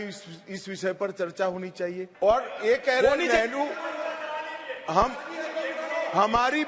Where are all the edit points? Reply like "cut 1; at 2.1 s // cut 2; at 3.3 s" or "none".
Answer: cut 1; at 2.1 s

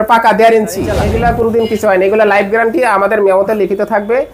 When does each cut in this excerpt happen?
cut 1; at 1.0 s

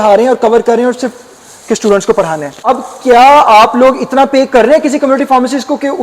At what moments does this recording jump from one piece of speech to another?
cut 1; at 2.5 s

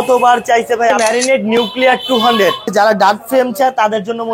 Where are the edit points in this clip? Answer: cut 1; at 1.0 s // cut 2; at 2.7 s

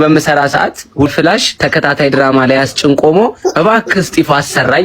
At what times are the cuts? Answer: cut 1; at 1.1 s

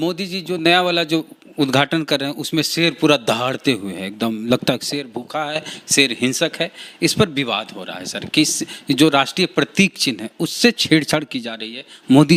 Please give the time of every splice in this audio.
none

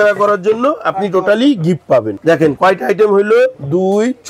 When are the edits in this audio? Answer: none

